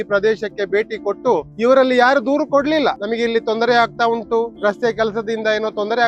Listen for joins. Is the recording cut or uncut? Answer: cut